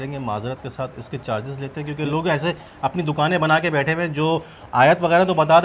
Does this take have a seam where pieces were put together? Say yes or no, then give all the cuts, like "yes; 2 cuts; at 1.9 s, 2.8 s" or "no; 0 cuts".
no; 0 cuts